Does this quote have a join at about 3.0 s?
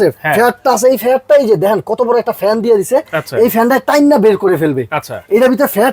no; 0 cuts

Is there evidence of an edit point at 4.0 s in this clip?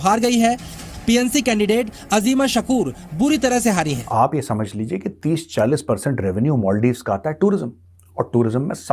yes; 1 cut; at 4.0 s

